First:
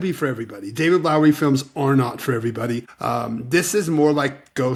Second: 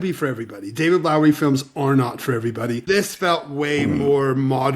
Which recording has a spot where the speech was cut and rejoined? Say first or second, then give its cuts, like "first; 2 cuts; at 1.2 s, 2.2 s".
second; 1 cut; at 2.8 s